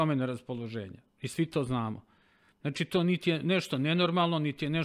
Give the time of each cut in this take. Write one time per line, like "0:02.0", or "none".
none